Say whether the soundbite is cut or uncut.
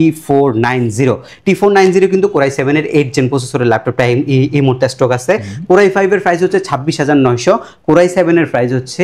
uncut